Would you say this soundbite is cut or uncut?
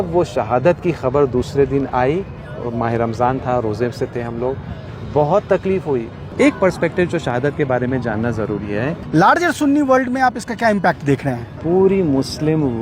cut